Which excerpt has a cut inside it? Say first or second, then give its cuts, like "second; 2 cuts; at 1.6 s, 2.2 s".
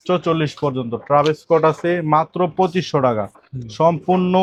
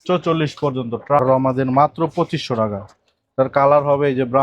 second; 1 cut; at 1.2 s